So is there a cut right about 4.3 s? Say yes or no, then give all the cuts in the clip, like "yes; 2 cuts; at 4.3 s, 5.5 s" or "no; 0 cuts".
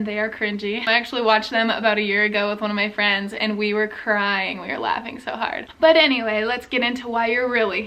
no; 2 cuts; at 0.8 s, 5.7 s